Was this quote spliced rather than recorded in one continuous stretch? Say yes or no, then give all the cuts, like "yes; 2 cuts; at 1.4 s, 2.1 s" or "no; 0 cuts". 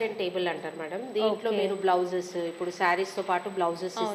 no; 0 cuts